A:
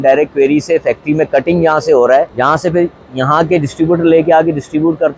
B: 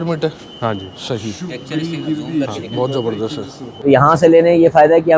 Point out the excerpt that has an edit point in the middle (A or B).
B